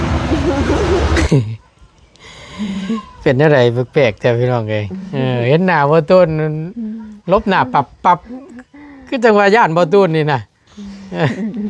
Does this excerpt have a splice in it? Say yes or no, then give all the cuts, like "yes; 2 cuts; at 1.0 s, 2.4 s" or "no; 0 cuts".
yes; 1 cut; at 1.3 s